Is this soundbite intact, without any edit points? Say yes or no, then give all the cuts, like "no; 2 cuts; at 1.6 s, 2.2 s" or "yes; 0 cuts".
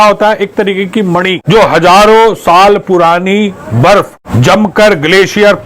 no; 2 cuts; at 1.4 s, 4.2 s